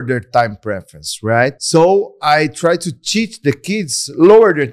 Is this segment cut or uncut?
cut